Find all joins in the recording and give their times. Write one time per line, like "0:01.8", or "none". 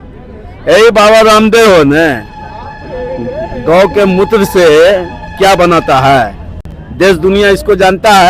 none